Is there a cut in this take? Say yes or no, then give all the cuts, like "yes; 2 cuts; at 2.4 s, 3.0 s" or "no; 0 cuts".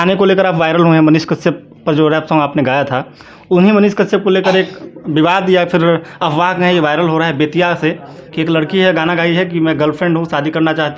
no; 0 cuts